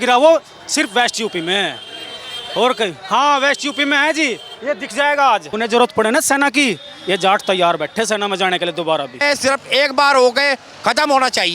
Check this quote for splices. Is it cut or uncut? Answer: cut